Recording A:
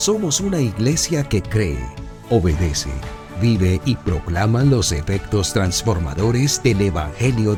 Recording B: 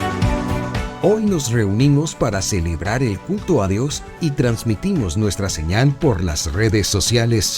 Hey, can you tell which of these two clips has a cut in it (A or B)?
B